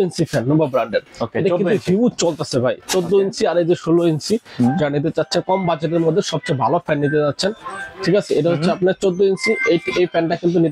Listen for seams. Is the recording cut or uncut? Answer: uncut